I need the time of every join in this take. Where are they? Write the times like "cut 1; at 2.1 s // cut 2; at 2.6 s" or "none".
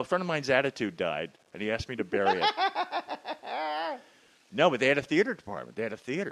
cut 1; at 1.5 s